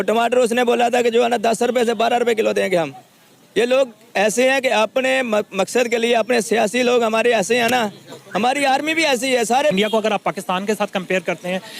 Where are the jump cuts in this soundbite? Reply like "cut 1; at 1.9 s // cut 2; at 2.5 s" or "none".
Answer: cut 1; at 9.7 s